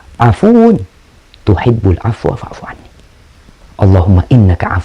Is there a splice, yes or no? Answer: no